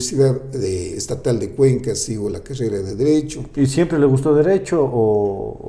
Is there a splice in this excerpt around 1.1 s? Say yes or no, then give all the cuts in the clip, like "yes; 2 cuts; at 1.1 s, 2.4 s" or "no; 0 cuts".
no; 0 cuts